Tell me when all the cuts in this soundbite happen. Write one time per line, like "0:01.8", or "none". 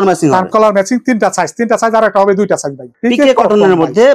0:03.0